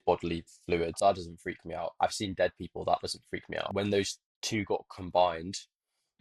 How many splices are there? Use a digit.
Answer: 2